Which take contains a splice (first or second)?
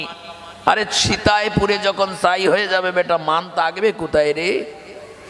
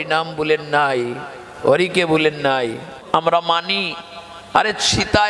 second